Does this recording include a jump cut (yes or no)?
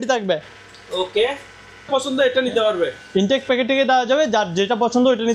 yes